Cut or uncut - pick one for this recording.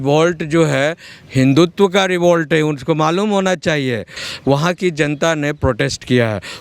cut